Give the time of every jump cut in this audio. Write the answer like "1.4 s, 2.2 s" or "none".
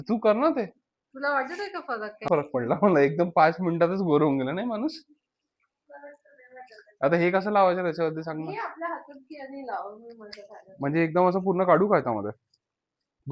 2.3 s